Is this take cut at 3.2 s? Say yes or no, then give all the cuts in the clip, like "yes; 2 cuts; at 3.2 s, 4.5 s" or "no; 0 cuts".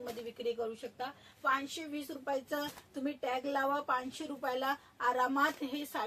no; 0 cuts